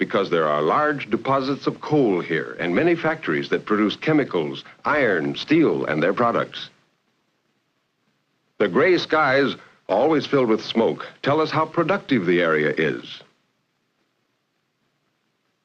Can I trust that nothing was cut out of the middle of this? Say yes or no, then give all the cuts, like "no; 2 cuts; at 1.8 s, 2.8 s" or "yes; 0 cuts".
yes; 0 cuts